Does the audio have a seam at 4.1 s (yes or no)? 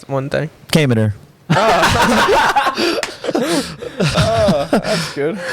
yes